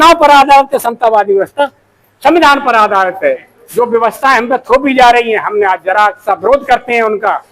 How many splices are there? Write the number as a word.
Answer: one